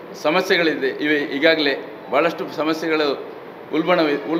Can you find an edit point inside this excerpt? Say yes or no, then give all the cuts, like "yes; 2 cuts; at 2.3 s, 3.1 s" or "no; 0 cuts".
no; 0 cuts